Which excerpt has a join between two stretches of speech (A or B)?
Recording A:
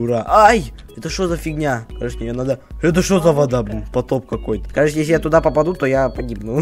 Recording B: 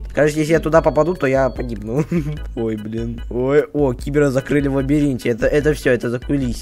B